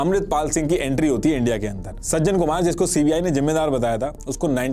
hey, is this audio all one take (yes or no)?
no